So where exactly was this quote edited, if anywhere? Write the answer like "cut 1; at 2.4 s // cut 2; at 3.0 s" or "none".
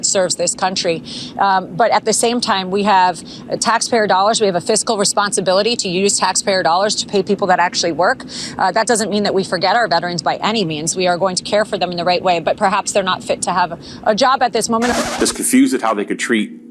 cut 1; at 14.9 s